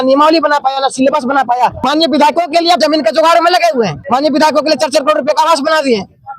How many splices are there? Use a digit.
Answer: 3